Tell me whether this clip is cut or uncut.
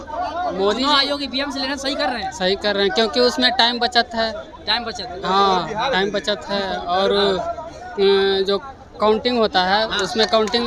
uncut